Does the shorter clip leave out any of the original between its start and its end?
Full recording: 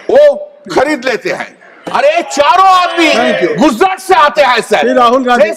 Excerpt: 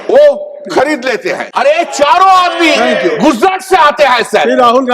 yes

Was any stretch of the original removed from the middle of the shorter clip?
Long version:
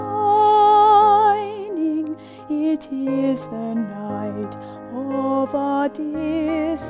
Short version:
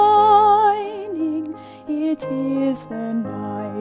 no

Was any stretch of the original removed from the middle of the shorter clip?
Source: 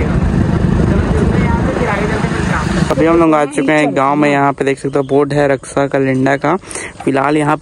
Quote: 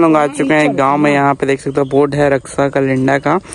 no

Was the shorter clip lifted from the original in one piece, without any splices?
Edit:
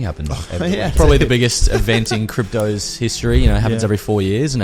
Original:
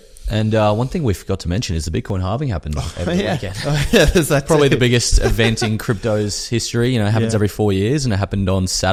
no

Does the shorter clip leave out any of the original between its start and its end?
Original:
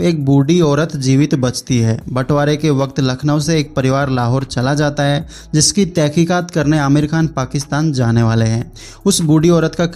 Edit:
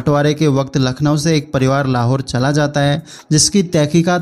no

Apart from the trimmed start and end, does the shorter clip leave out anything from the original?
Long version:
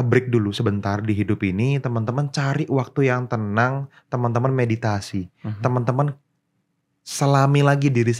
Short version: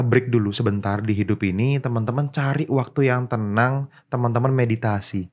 no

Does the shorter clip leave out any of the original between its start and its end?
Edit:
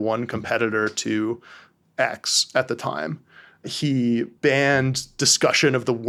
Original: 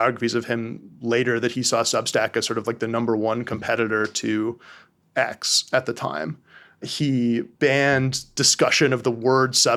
no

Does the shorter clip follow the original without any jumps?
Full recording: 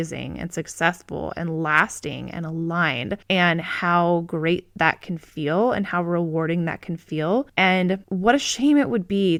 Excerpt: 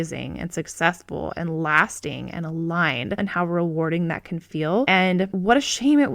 no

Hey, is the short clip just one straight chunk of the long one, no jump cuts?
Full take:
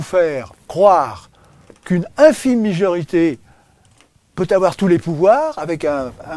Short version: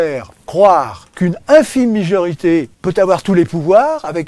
no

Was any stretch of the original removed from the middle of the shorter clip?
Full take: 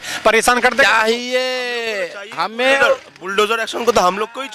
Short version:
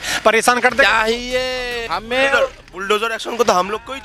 yes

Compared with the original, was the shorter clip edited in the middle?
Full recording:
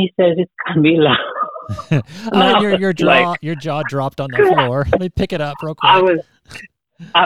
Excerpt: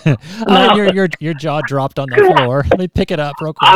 yes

